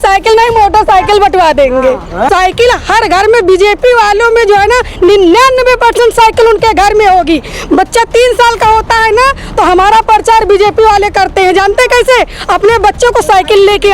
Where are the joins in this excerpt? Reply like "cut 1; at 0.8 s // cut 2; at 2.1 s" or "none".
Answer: cut 1; at 2.3 s